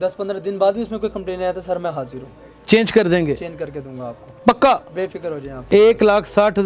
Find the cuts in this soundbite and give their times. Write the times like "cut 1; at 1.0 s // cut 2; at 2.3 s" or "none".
cut 1; at 5.5 s

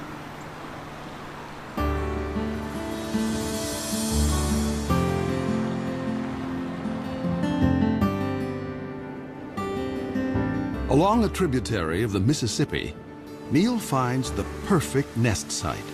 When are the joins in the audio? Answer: none

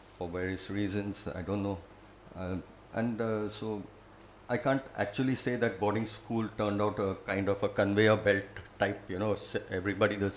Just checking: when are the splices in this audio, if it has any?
none

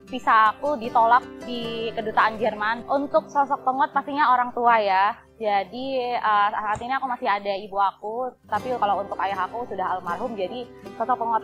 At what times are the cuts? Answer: cut 1; at 2.8 s

